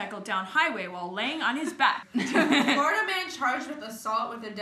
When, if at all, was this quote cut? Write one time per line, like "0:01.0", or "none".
0:02.1